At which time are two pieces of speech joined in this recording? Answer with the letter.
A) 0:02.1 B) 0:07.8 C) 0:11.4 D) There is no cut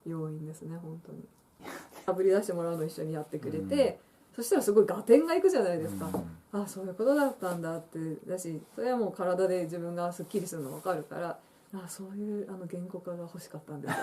A